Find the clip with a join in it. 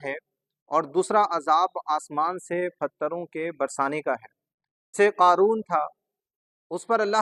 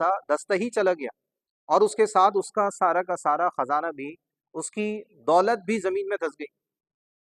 first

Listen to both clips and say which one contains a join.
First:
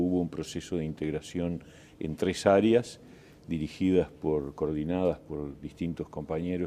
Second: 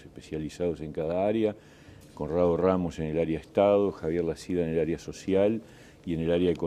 second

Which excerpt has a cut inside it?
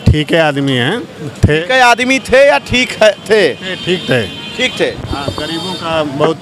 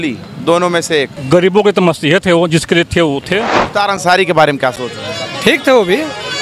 second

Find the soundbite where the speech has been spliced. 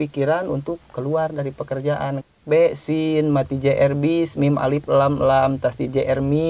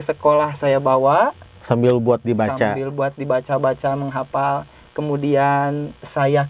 first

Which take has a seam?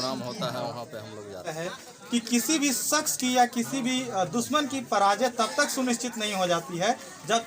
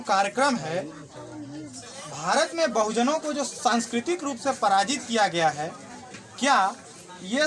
first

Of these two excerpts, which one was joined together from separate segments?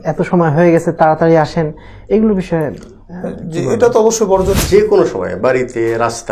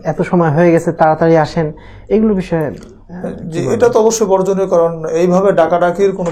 first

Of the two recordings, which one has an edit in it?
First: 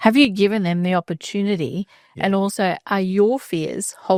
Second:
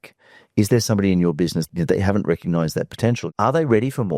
second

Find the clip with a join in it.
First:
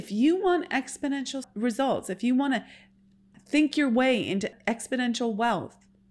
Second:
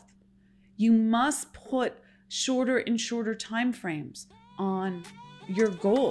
first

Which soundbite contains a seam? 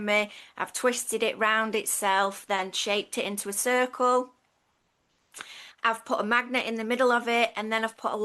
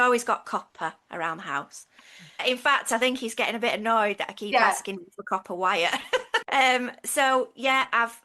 second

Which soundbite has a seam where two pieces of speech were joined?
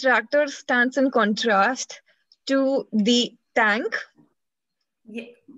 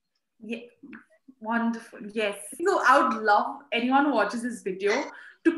second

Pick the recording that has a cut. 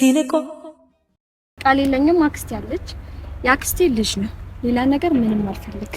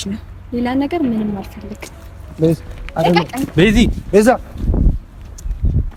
first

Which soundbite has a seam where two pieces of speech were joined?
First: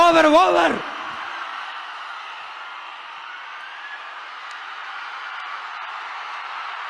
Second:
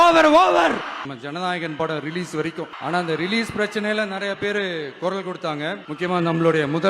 second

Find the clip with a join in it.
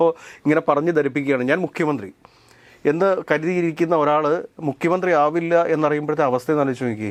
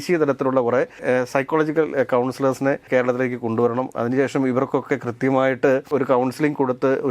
second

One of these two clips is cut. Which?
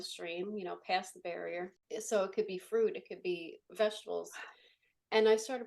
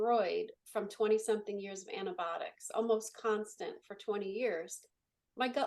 first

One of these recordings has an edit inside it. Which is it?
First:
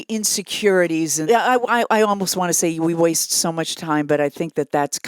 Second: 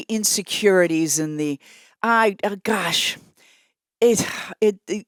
first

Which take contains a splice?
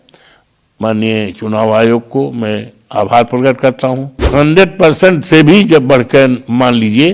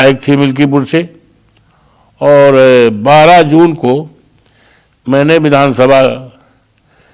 first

